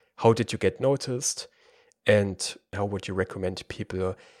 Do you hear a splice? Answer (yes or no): yes